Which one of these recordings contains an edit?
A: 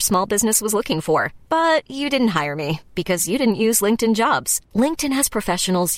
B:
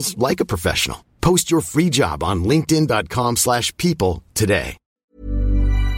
B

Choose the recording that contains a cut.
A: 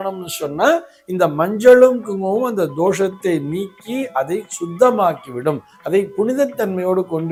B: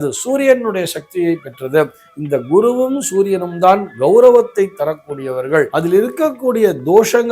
B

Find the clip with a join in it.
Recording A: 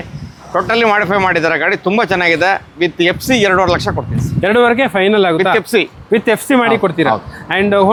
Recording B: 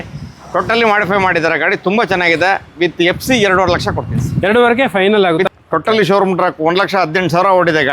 B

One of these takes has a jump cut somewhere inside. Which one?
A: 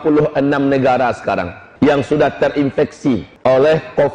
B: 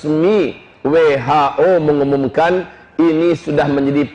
A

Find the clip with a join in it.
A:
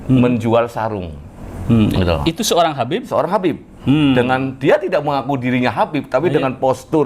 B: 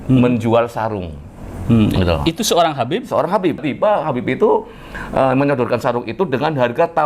B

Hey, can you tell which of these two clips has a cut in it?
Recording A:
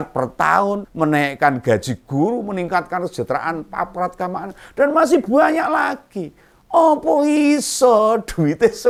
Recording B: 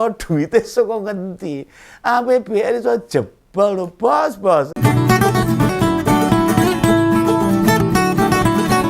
B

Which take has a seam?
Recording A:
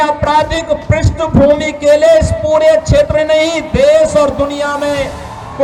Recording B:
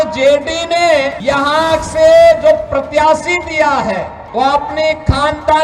B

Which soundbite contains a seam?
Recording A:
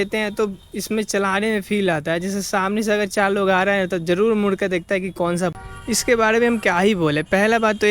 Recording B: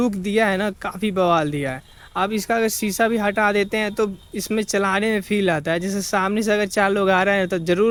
A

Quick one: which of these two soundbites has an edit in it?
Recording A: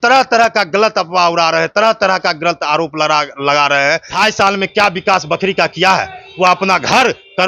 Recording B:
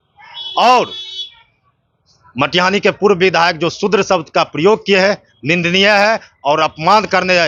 A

